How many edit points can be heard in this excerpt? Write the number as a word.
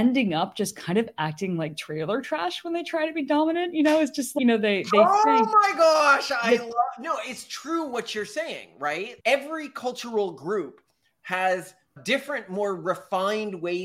one